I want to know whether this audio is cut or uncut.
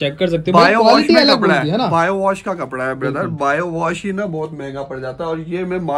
uncut